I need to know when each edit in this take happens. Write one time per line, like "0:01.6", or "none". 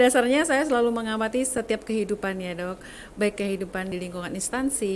0:03.9